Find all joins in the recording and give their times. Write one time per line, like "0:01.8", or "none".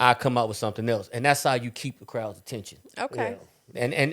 none